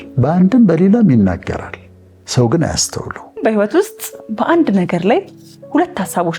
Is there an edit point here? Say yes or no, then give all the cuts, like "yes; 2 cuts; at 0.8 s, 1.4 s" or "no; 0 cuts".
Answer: yes; 1 cut; at 3.4 s